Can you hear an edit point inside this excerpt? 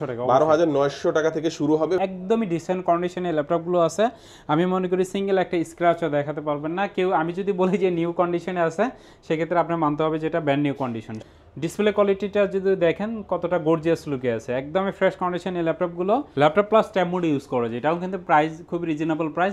yes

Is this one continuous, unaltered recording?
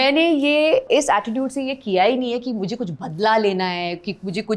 yes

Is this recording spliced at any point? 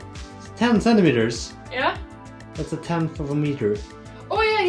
no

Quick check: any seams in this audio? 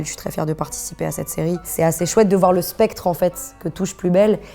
yes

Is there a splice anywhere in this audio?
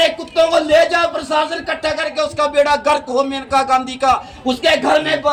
no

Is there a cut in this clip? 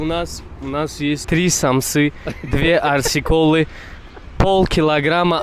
no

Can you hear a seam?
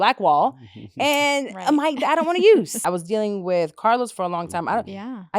yes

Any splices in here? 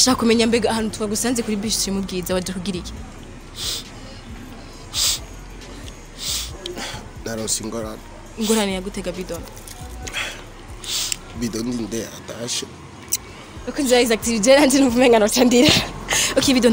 no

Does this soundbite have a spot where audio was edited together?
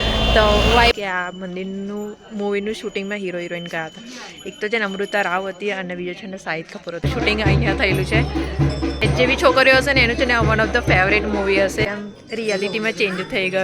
yes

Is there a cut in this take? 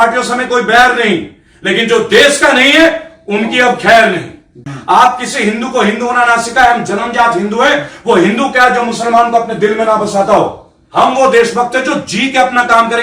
yes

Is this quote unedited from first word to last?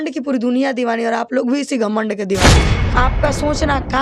no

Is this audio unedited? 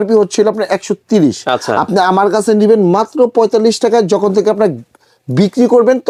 yes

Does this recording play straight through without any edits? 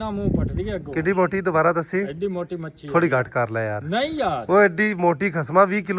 yes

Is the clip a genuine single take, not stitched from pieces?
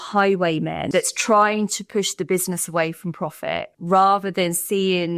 no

